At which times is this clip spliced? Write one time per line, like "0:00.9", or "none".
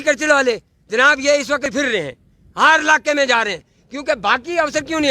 0:01.7